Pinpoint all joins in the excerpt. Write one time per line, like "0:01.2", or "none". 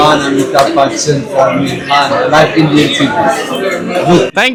none